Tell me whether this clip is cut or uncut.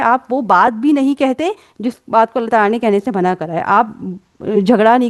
uncut